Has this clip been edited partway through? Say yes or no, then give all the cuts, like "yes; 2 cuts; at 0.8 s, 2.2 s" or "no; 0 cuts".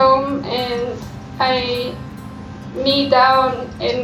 no; 0 cuts